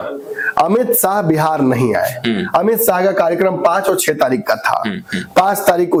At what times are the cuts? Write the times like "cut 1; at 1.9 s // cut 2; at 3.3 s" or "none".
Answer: none